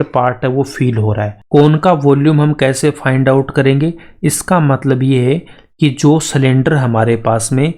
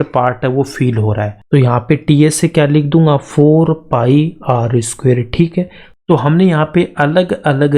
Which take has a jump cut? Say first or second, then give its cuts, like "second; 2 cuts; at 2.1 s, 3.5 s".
second; 2 cuts; at 1.4 s, 5.8 s